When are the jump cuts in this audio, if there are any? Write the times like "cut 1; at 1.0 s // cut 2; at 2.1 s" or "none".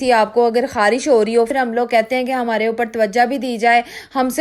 cut 1; at 1.5 s